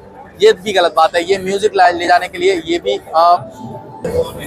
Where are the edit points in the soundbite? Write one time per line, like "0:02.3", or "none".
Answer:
0:03.0

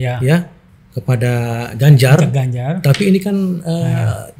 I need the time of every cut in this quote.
none

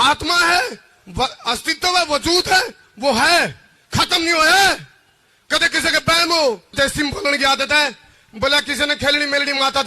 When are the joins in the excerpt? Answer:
0:06.7

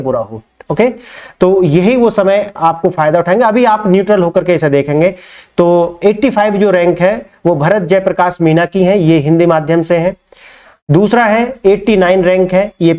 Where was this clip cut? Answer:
none

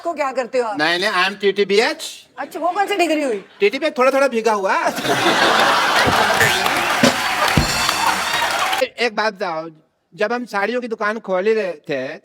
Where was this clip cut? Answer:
0:08.8

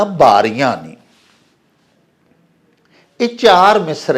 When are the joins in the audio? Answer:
none

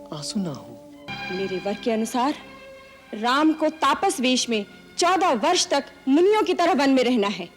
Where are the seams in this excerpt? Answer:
0:01.1

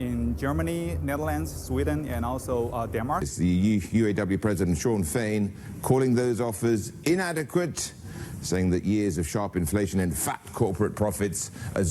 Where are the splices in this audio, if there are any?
0:03.2

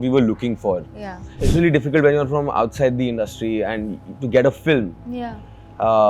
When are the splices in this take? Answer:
0:01.4

